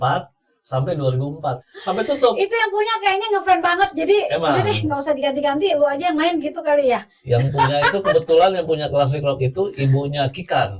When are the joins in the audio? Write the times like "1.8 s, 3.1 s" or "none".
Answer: 1.6 s